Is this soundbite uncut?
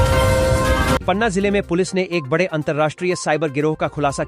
yes; 0 cuts

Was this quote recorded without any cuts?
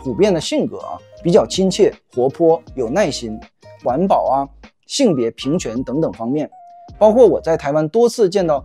no; 1 cut; at 3.8 s

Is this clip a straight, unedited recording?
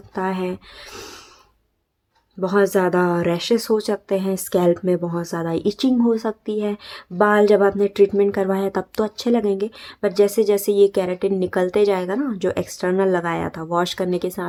yes; 0 cuts

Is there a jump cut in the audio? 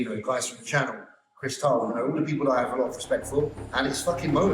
yes; 1 cut; at 3.6 s

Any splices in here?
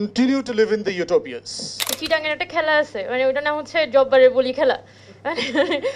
yes; 1 cut; at 2.0 s

